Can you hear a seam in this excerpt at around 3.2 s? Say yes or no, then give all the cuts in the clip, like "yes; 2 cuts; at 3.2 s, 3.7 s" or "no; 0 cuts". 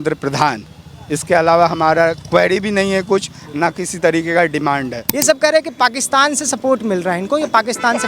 no; 1 cut; at 5.0 s